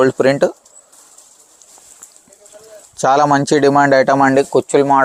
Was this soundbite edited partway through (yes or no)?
no